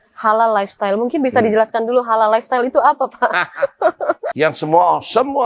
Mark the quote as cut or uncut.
cut